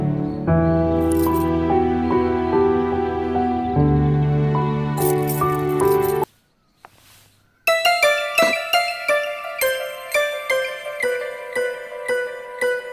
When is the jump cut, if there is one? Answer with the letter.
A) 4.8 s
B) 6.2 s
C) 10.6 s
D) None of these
B